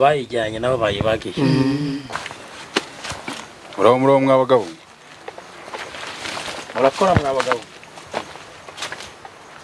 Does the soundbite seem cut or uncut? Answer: cut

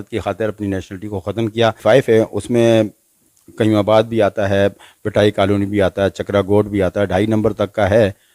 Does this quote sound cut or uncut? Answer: cut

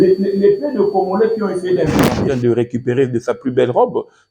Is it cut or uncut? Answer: cut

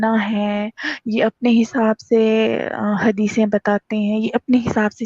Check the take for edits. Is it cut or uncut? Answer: uncut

